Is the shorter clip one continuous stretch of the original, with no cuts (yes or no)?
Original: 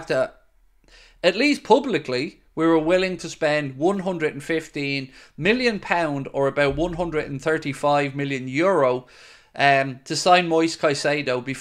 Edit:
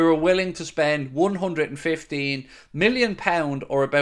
yes